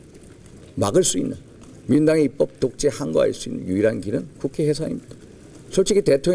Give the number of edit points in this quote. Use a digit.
0